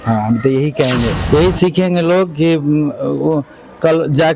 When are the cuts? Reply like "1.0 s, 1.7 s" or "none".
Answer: 1.2 s